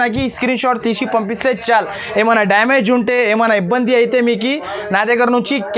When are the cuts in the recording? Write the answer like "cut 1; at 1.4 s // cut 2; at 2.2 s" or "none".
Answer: none

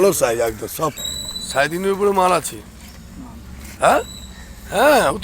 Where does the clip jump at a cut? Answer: cut 1; at 0.9 s

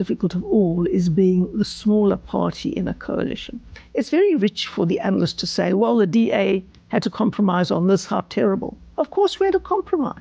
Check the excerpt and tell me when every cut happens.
cut 1; at 3.8 s

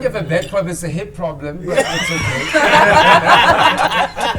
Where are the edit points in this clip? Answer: none

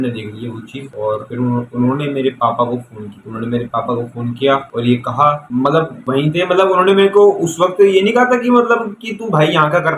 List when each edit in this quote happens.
none

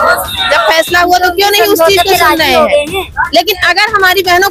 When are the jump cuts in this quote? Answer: none

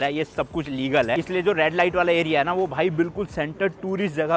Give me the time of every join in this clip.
none

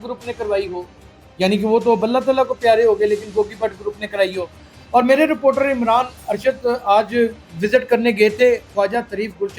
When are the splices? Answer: none

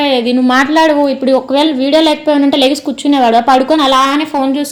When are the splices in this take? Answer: none

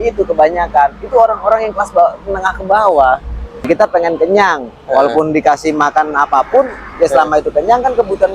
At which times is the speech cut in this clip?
cut 1; at 3.7 s

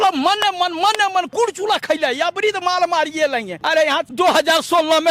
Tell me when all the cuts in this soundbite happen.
cut 1; at 1.3 s // cut 2; at 3.9 s

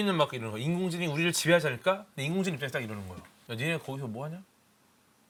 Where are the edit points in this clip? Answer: none

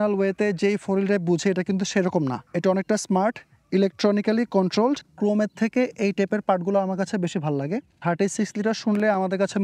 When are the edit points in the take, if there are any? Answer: cut 1; at 5.1 s // cut 2; at 7.9 s

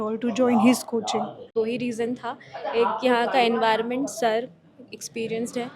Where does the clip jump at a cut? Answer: cut 1; at 1.5 s

